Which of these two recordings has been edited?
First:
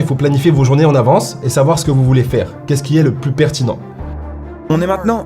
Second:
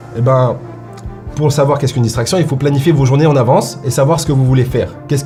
first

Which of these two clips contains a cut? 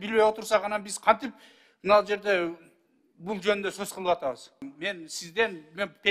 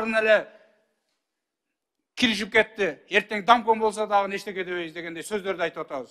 first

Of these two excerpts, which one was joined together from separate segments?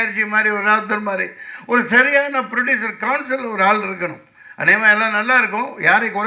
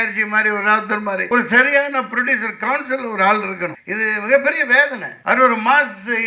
second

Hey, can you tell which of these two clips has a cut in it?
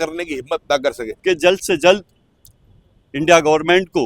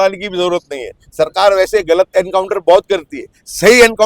first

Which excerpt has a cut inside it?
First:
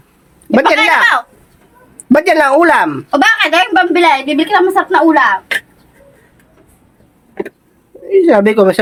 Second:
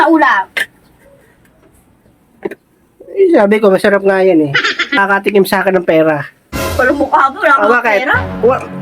second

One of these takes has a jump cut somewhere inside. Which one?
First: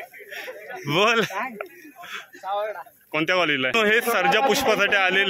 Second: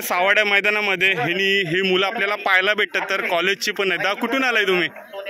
first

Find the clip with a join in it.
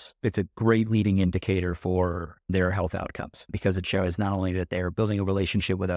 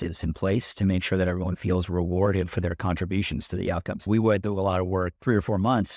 second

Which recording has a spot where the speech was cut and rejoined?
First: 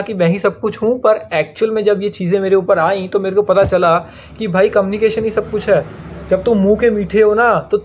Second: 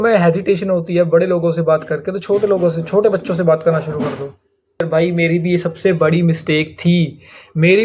second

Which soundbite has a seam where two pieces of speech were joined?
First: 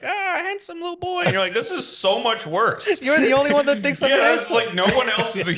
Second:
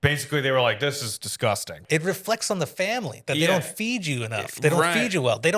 second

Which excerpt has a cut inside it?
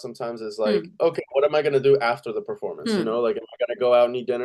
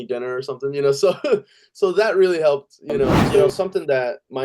second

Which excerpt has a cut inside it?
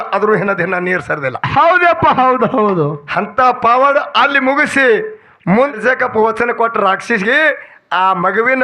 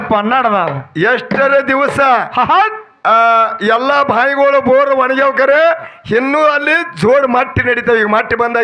first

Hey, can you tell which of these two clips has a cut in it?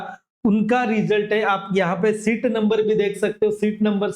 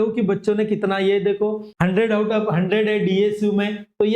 second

